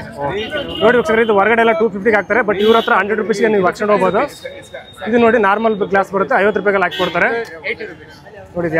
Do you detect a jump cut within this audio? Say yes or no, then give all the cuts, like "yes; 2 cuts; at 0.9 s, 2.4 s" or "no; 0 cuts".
no; 0 cuts